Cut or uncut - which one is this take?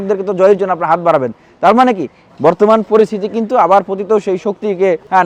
uncut